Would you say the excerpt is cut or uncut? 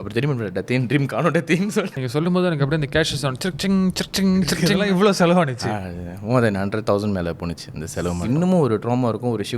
cut